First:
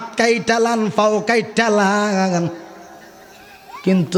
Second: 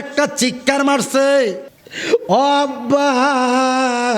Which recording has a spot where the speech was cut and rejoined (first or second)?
second